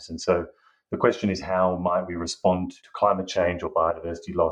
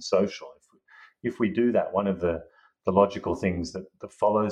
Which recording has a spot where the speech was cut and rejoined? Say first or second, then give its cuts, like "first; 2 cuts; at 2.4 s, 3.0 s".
first; 1 cut; at 2.8 s